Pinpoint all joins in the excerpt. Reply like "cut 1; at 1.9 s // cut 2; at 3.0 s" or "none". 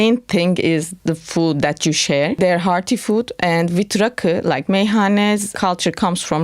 cut 1; at 2.4 s // cut 2; at 5.5 s

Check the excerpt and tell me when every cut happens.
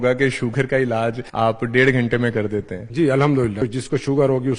cut 1; at 1.2 s // cut 2; at 2.8 s // cut 3; at 3.6 s

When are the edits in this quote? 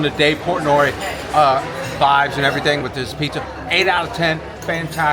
none

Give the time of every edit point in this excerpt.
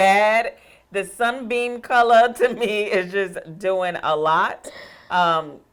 none

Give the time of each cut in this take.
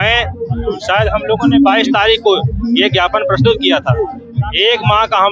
none

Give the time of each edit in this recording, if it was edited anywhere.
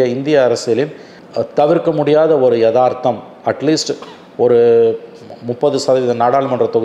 none

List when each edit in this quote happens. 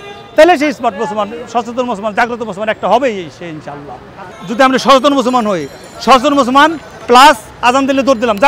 cut 1; at 4.3 s

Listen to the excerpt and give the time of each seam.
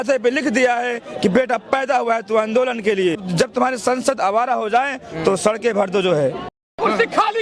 cut 1; at 3.2 s // cut 2; at 6.5 s

